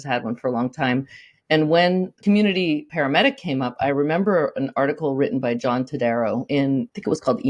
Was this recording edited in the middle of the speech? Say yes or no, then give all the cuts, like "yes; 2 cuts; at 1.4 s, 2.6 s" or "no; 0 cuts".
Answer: yes; 2 cuts; at 2.1 s, 2.9 s